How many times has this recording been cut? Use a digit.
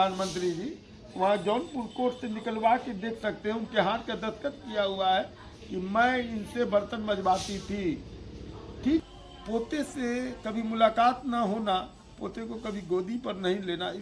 1